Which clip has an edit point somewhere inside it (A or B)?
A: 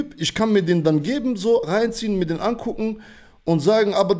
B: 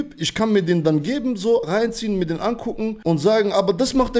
B